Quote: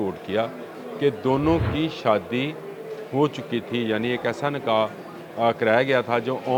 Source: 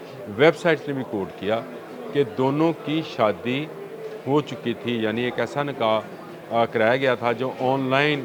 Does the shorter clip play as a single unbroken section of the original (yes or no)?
yes